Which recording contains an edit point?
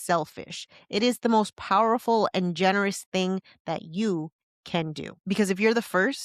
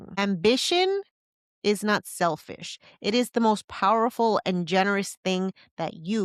first; 1 cut; at 5.1 s

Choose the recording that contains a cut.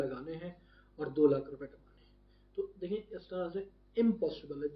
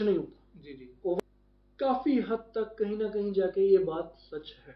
second; 1 cut; at 1.2 s

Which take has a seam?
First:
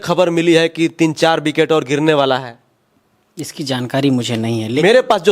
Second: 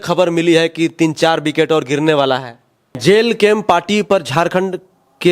second; 1 cut; at 2.9 s

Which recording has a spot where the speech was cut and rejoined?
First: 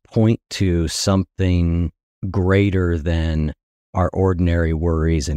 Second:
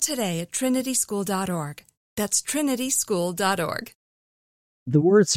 second; 1 cut; at 4.5 s

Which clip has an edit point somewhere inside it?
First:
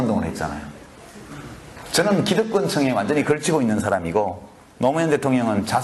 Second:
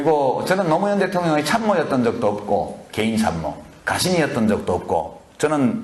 first; 1 cut; at 1.8 s

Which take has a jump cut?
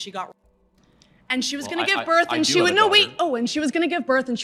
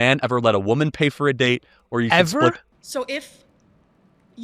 second; 1 cut; at 2.6 s

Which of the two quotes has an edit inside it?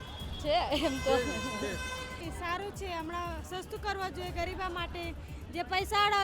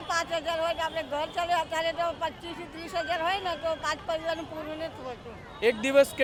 first; 1 cut; at 2.2 s

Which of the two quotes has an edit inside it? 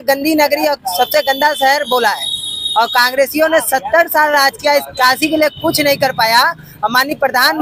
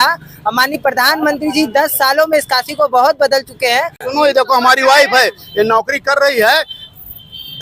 second; 1 cut; at 4.0 s

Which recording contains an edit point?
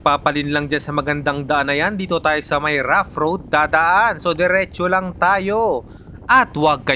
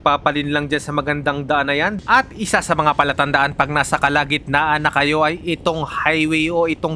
second; 1 cut; at 2.0 s

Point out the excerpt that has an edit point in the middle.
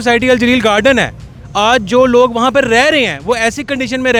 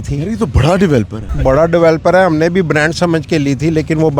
second; 1 cut; at 1.2 s

